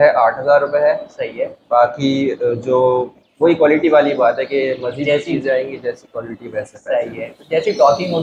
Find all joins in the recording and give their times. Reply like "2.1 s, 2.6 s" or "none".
none